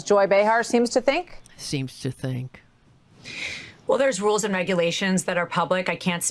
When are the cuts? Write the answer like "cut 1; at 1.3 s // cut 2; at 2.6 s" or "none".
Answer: none